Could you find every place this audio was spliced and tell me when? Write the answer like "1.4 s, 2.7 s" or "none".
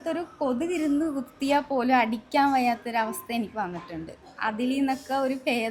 none